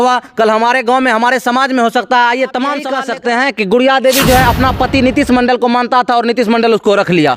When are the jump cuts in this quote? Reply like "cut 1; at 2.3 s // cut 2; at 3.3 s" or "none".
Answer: cut 1; at 2.9 s